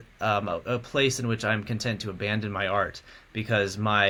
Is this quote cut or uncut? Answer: uncut